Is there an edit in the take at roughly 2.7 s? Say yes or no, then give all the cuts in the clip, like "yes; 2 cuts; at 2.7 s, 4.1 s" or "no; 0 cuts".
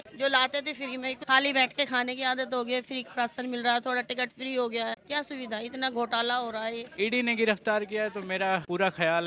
no; 3 cuts; at 1.2 s, 5.0 s, 6.9 s